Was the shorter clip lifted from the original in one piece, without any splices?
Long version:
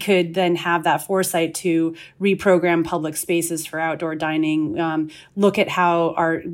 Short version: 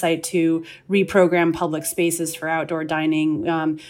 yes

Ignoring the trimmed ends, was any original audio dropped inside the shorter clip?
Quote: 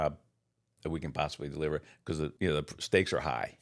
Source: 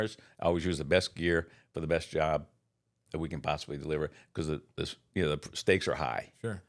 yes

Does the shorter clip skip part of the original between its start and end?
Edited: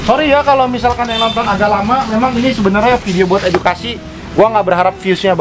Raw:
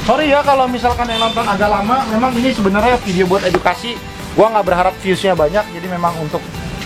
no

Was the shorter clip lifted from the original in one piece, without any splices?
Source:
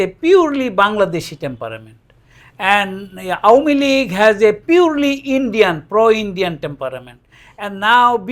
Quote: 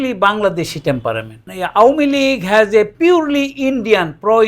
no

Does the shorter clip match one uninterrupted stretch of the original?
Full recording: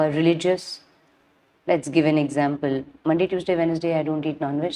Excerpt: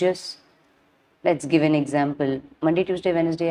yes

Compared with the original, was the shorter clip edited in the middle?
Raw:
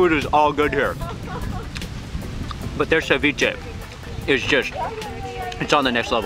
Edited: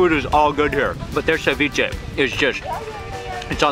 yes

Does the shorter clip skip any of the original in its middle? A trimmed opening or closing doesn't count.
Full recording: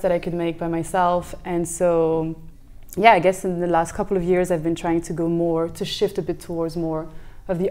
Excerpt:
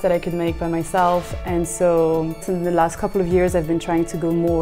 yes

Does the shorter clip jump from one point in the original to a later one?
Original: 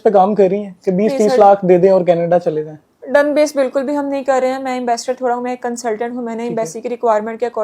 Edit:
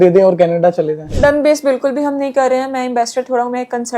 yes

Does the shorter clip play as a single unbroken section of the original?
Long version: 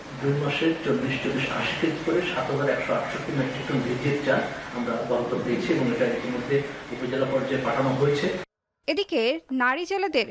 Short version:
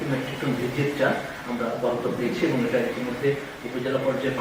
yes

